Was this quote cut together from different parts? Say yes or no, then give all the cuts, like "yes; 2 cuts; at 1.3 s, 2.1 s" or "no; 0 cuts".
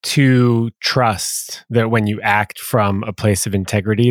no; 0 cuts